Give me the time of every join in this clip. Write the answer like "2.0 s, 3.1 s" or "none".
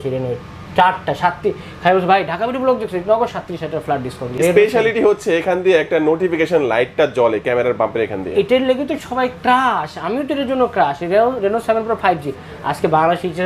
4.3 s